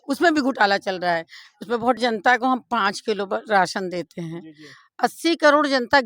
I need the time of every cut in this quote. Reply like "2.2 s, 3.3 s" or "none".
2.0 s